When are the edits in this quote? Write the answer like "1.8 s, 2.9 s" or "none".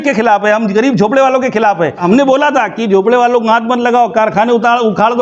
2.0 s